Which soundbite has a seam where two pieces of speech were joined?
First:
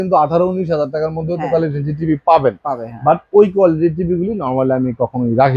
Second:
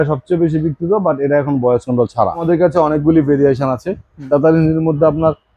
second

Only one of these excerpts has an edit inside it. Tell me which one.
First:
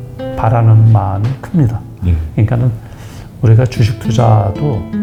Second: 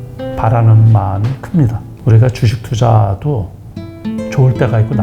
second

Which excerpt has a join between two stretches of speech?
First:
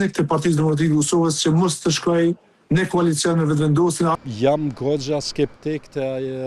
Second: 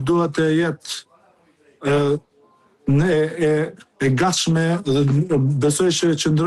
first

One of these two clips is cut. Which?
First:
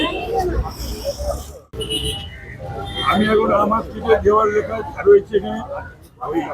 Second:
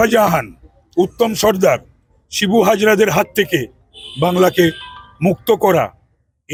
first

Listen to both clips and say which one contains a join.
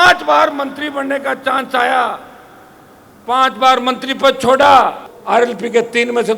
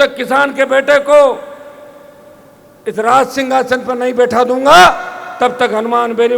first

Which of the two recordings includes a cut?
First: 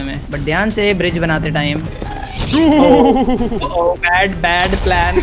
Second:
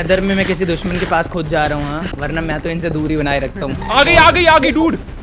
second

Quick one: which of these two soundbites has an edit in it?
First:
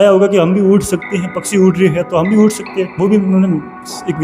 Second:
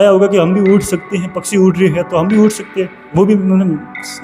first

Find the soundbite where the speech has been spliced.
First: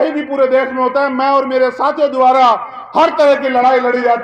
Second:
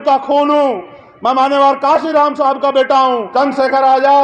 second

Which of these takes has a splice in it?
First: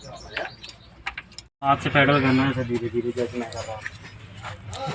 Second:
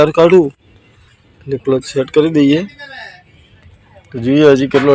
first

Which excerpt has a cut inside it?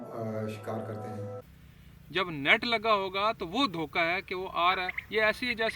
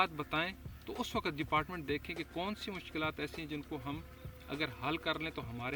first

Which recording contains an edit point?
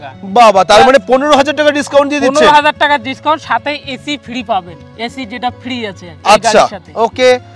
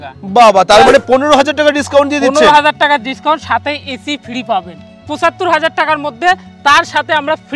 second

